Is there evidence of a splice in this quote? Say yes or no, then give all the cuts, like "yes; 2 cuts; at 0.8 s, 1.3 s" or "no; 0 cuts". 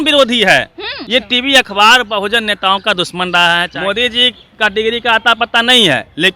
yes; 2 cuts; at 0.9 s, 3.7 s